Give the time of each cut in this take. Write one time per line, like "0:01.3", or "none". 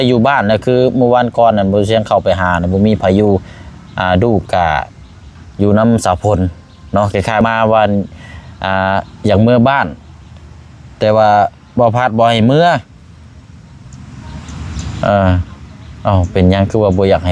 0:07.4